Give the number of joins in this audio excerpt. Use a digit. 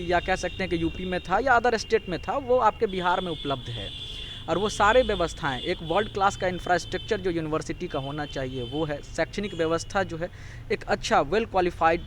0